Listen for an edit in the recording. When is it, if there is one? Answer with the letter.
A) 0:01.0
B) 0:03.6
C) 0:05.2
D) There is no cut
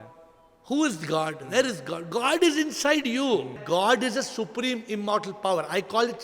B